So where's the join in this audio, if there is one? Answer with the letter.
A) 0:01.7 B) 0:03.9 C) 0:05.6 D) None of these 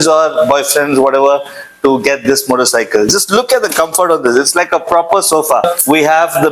C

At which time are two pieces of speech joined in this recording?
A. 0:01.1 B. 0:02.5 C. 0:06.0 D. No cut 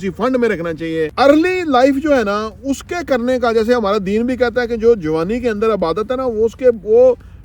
A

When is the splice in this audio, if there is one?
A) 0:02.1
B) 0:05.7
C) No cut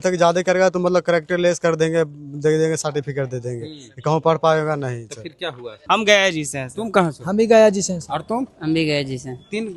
B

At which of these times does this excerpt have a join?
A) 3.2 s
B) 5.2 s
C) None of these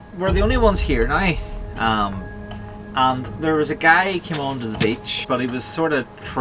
B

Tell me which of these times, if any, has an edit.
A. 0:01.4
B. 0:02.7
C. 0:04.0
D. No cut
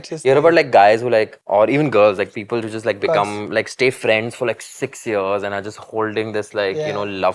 A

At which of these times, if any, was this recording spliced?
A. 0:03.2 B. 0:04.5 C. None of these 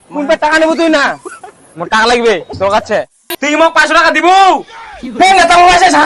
A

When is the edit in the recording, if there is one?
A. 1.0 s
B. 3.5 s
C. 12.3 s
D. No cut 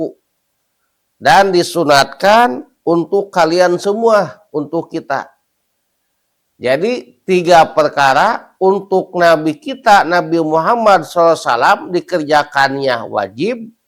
D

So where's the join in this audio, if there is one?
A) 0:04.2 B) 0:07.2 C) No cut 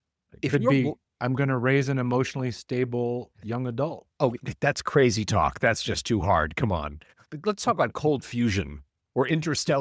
B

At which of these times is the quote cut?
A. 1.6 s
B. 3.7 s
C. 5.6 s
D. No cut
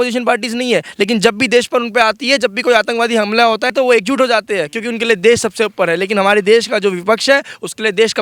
B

